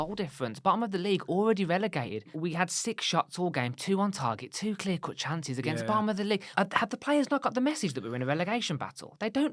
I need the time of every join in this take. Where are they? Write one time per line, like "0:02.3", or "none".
0:02.3
0:06.5